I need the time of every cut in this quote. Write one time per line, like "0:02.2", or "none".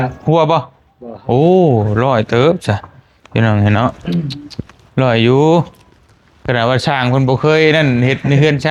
none